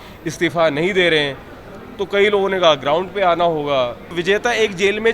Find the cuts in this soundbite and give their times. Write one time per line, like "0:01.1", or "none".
0:04.2